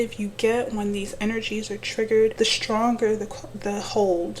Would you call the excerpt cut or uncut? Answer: cut